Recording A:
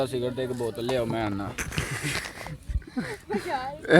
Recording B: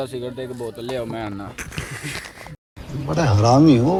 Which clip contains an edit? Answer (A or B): A